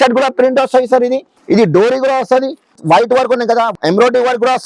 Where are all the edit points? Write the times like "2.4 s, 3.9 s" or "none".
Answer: 1.3 s, 2.8 s, 3.8 s